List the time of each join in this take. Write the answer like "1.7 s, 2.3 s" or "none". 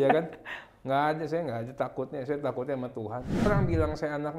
3.5 s